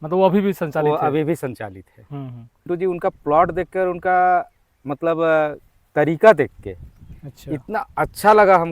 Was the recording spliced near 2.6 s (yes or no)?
yes